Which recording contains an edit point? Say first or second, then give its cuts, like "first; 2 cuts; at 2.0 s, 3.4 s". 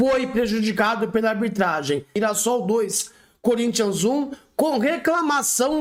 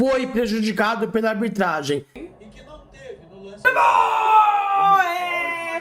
second; 1 cut; at 2.1 s